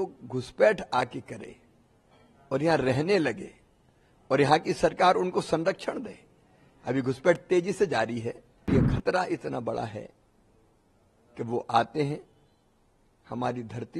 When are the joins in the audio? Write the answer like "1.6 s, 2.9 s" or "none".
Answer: 8.7 s